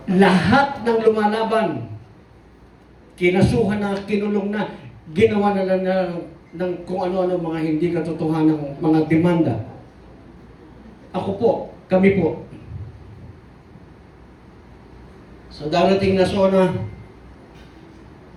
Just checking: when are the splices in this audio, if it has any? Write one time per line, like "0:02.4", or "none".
none